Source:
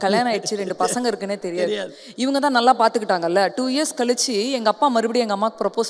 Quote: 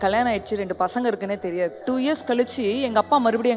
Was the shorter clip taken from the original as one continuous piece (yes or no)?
no